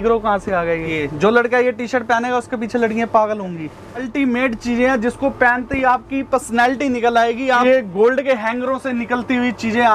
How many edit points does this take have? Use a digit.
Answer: 3